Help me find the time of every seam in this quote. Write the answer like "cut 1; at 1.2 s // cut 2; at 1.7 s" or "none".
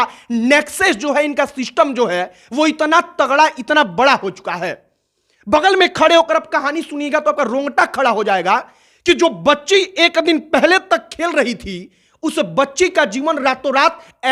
none